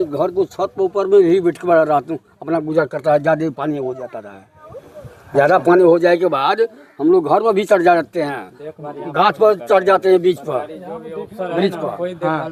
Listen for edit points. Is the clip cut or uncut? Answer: uncut